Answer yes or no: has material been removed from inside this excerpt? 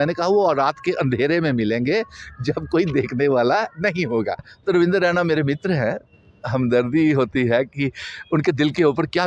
yes